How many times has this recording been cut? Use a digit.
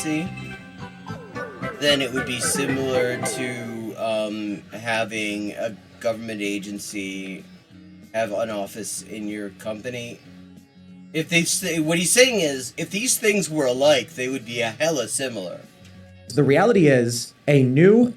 1